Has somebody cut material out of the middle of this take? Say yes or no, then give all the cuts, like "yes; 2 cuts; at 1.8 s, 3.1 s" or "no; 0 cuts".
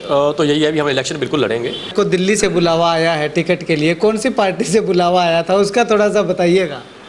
yes; 1 cut; at 1.9 s